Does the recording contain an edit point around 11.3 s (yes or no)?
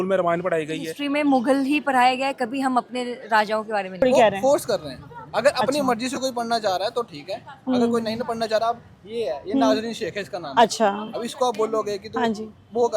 no